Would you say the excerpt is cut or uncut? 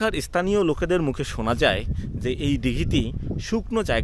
uncut